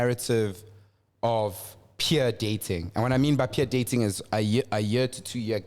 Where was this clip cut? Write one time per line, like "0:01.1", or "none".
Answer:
none

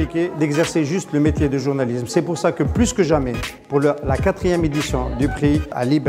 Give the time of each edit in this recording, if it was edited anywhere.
none

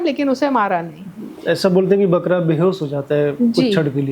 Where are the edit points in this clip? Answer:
none

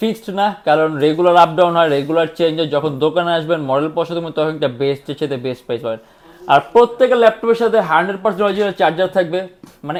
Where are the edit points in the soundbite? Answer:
none

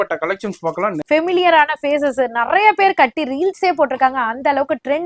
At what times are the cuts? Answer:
0:01.0

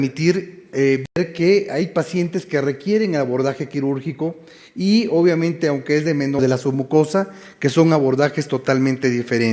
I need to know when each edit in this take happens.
none

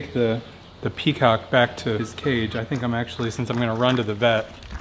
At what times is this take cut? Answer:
0:02.1

